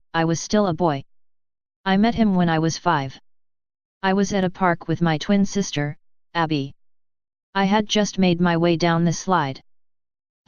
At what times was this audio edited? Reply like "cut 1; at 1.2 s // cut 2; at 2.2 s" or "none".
none